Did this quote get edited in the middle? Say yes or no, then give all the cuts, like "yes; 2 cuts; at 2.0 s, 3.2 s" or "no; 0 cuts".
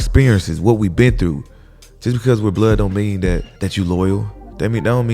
yes; 1 cut; at 3.5 s